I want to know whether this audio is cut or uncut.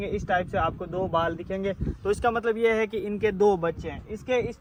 uncut